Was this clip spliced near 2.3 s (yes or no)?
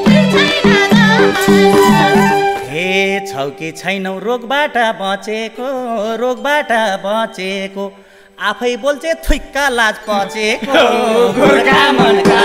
yes